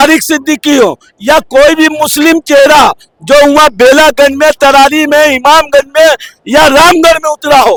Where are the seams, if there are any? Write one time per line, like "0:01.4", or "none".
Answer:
none